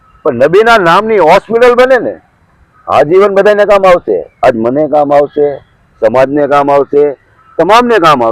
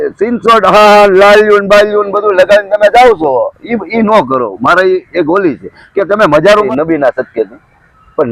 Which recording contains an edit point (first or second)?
second